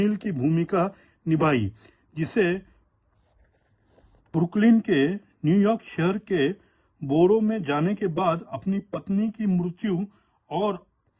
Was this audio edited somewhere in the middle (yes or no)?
no